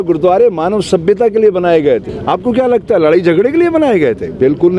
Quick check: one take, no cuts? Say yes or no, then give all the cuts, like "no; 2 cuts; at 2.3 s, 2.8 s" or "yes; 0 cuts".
no; 1 cut; at 2.1 s